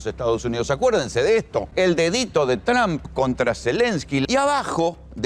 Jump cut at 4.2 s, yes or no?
yes